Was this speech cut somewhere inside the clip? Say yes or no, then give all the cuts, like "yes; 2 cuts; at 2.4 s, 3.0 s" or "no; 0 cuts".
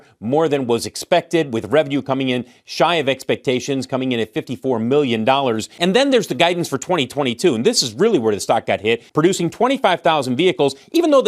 yes; 2 cuts; at 5.7 s, 9.1 s